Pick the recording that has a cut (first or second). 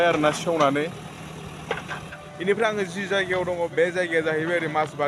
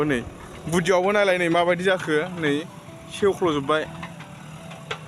first